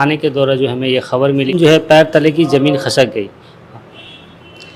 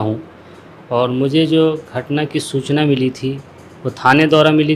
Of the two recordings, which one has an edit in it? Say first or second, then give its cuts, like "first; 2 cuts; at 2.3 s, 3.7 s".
first; 1 cut; at 1.5 s